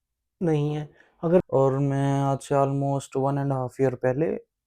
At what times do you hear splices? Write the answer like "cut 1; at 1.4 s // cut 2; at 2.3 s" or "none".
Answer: cut 1; at 1.4 s

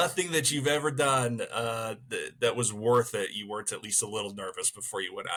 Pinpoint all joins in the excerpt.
none

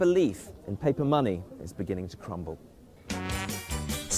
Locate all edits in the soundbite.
none

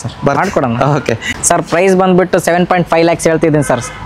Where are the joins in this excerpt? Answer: cut 1; at 1.2 s

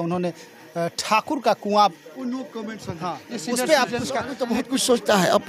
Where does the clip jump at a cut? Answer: cut 1; at 4.3 s

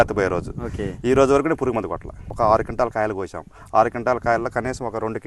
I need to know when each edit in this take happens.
cut 1; at 2.3 s

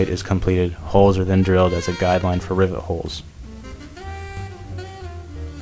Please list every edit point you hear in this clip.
cut 1; at 3.2 s

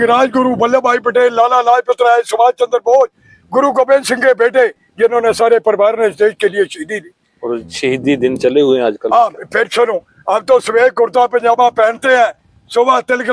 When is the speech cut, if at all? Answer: none

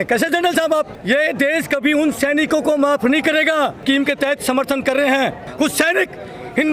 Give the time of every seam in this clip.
cut 1; at 1.0 s // cut 2; at 3.8 s // cut 3; at 5.4 s

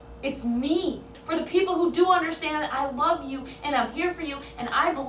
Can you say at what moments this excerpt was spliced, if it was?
cut 1; at 1.2 s

